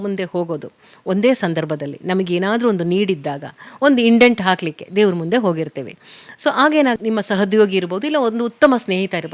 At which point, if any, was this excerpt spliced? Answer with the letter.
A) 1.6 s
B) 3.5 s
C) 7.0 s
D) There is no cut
C